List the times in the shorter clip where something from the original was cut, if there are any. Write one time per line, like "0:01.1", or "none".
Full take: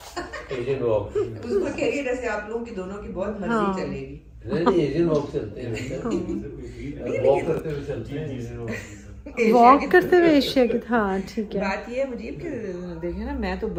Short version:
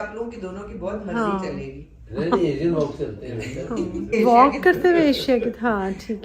0:04.1